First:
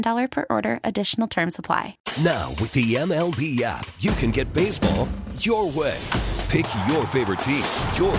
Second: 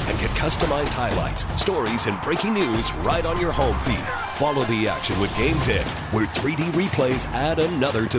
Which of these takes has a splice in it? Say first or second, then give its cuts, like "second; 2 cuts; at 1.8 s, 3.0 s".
first; 1 cut; at 2.0 s